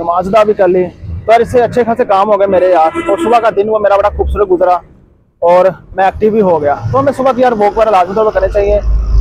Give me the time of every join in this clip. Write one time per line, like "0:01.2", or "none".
none